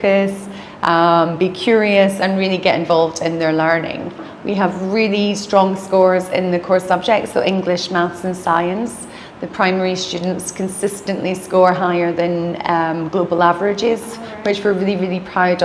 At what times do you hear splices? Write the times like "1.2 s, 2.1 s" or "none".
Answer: 4.3 s